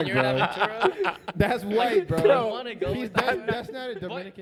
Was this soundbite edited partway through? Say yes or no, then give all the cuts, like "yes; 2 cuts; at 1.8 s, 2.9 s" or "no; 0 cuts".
no; 0 cuts